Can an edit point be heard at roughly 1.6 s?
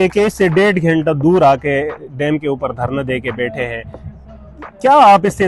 no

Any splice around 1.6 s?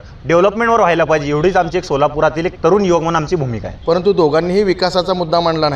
no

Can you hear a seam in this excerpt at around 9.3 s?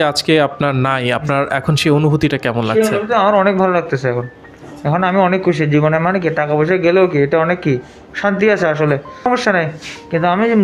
yes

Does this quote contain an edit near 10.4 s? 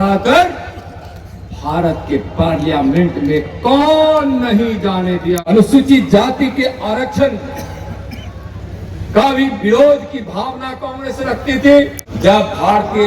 no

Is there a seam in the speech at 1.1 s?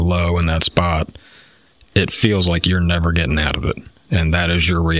no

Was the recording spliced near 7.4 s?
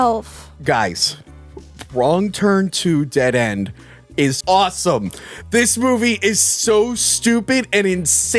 no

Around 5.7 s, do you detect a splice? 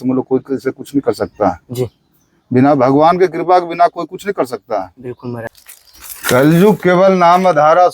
yes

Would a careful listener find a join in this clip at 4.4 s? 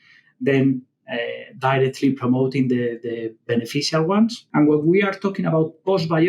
yes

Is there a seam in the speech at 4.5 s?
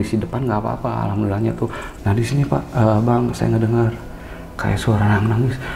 no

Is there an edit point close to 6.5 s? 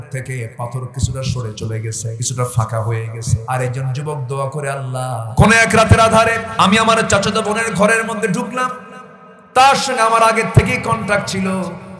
yes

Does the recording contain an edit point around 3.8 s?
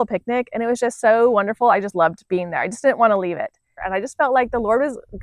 yes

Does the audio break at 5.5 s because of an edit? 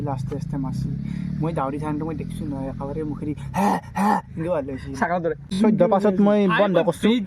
yes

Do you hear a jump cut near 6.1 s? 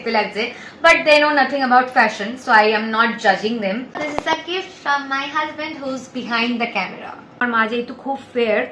no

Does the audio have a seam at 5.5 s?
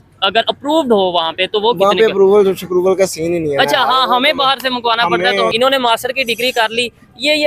yes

